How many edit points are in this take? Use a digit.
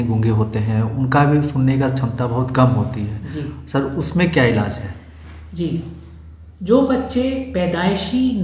0